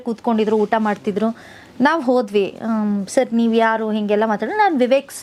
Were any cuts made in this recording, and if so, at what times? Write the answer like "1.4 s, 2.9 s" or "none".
none